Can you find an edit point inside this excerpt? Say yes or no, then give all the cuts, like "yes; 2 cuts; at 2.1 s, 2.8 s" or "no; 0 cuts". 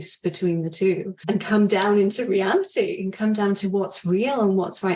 yes; 1 cut; at 1.1 s